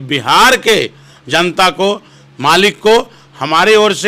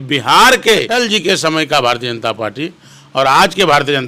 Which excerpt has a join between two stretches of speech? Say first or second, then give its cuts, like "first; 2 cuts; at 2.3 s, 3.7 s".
second; 1 cut; at 0.9 s